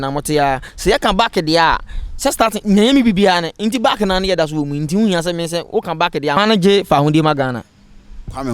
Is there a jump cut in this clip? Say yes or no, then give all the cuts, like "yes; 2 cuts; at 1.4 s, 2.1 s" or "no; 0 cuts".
yes; 1 cut; at 6.4 s